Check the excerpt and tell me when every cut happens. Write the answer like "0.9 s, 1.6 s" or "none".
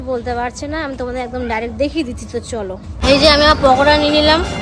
2.9 s